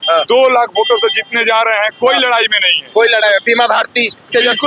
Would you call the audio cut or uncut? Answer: uncut